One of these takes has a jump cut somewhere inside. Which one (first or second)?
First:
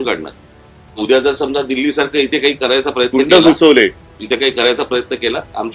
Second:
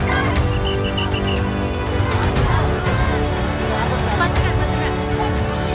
first